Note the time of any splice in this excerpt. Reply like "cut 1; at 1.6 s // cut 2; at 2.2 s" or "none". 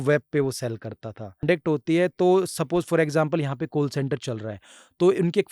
cut 1; at 1.3 s